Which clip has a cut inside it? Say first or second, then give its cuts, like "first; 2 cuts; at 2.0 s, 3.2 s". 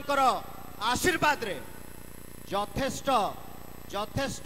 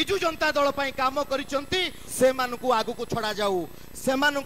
second; 1 cut; at 2.0 s